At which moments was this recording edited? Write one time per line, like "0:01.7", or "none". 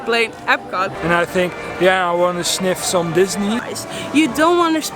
0:00.9
0:03.7